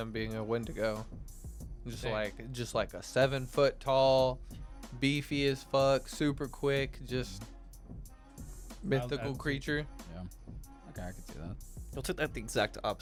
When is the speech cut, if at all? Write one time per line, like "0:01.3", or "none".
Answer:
none

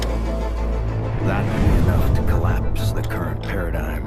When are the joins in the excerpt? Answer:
0:02.1

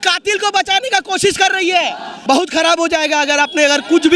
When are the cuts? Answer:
0:02.1

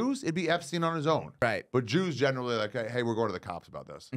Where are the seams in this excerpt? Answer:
0:01.4

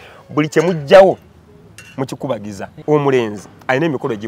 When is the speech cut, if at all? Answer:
0:02.7

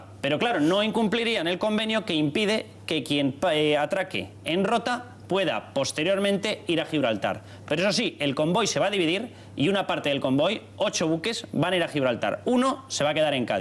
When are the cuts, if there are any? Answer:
0:04.0

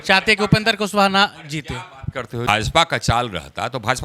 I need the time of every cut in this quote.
0:02.3

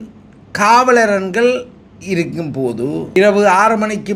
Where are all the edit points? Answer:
0:03.2

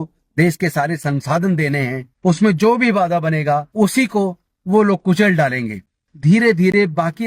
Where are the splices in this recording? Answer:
0:02.0
0:03.7
0:06.0

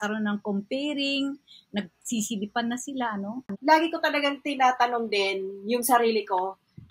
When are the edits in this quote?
0:03.4

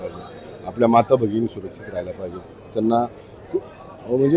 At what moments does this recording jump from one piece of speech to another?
none

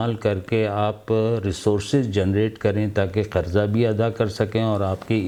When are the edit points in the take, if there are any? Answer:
none

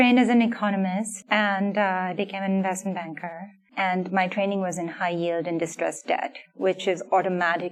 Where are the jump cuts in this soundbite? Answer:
none

